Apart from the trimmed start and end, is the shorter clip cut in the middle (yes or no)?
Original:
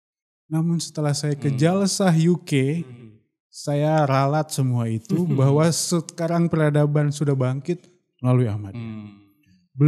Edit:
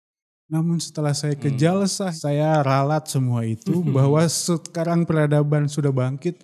yes